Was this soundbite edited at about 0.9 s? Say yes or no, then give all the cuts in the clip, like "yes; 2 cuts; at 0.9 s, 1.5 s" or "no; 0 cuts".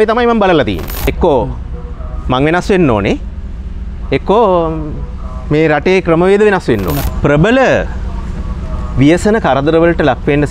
yes; 2 cuts; at 0.9 s, 7.1 s